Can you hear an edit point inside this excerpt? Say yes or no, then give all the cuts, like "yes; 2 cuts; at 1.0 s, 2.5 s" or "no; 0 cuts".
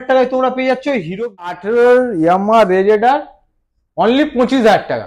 yes; 1 cut; at 1.6 s